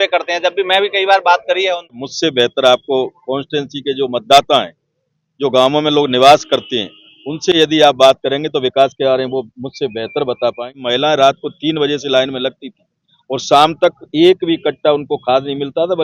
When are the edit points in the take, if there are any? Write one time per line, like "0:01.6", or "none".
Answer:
0:02.1
0:10.8